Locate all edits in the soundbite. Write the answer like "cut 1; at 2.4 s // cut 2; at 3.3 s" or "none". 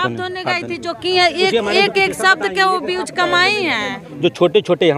cut 1; at 4.0 s